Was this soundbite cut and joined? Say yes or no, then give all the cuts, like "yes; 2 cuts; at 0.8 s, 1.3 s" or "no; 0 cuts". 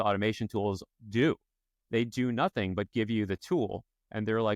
no; 0 cuts